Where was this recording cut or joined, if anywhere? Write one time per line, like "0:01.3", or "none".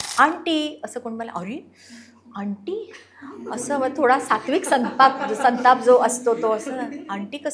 none